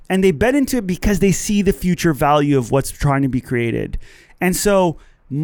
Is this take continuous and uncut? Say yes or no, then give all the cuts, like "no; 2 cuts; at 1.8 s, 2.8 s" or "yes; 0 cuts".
yes; 0 cuts